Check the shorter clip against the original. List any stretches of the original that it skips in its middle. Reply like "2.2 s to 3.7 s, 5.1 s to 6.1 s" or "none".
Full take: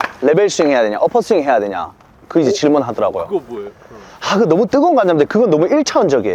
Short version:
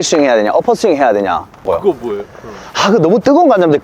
2.1 s to 3.1 s